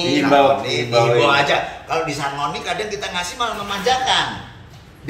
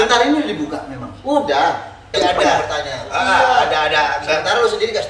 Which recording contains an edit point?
second; 1 cut; at 2.3 s

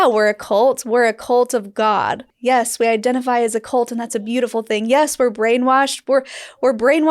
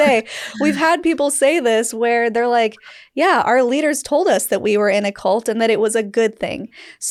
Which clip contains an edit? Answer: first; 1 cut; at 2.3 s

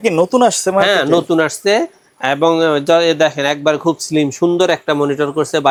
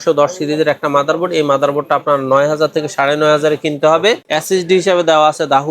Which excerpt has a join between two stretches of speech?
second; 1 cut; at 4.2 s

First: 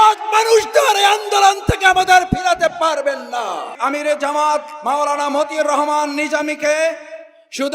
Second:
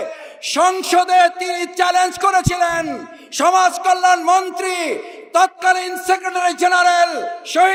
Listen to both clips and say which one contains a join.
first; 1 cut; at 3.7 s

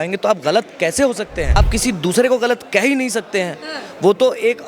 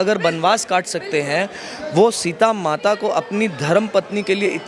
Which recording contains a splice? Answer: first; 1 cut; at 1.6 s

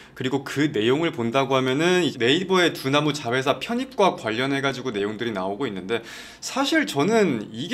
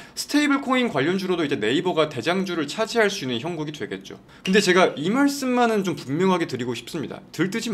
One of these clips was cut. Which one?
first; 1 cut; at 2.1 s

